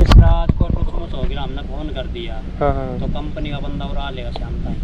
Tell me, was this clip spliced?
no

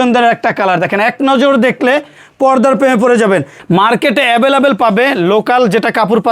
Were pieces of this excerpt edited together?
yes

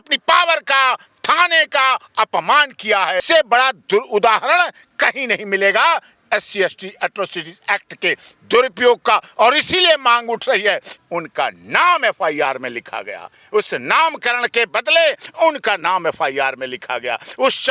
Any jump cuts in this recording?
yes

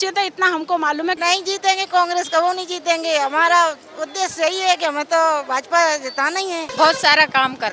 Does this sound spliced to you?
yes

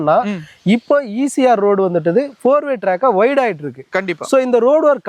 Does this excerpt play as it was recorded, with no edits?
yes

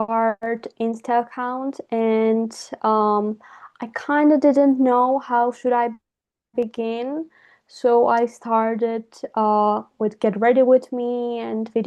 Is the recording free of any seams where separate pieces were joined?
yes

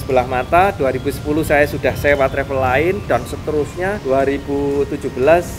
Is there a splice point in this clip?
no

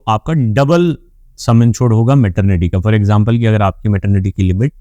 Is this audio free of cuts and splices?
yes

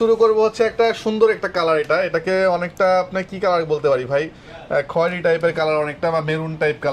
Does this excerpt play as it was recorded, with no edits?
yes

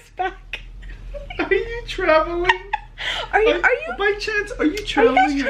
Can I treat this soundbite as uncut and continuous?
yes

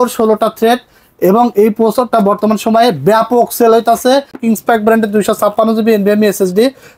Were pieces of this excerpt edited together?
yes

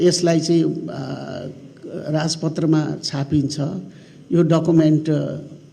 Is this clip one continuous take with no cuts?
yes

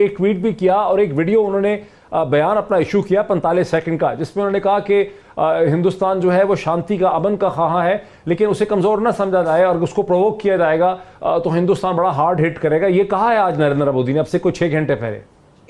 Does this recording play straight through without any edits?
yes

